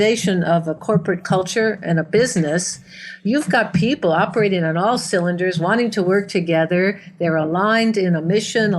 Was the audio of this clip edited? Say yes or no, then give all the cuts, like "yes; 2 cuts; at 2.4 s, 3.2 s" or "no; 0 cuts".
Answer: no; 0 cuts